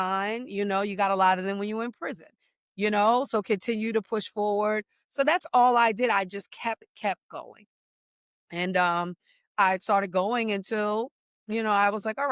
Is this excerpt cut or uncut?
uncut